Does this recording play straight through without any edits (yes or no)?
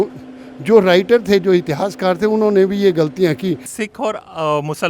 no